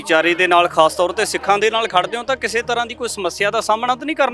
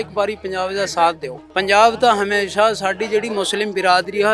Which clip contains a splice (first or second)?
second